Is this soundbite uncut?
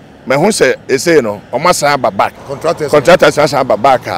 no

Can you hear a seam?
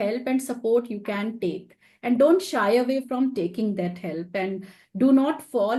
no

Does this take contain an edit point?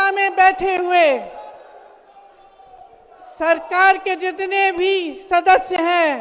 no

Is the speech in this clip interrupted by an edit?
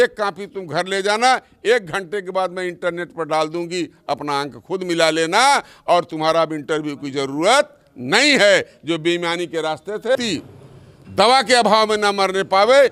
yes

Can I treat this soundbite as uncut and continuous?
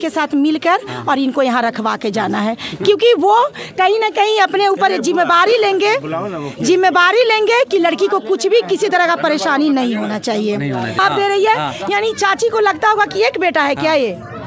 no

